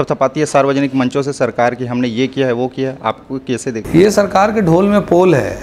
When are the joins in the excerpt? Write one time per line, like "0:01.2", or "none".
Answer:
none